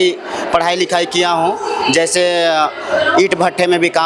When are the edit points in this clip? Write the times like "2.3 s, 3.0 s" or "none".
none